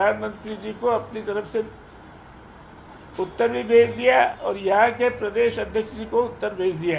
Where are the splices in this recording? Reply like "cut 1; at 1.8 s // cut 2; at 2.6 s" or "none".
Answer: none